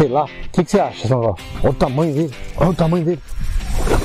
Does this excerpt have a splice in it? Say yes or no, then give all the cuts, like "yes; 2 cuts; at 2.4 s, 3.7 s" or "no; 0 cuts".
yes; 2 cuts; at 1.5 s, 2.4 s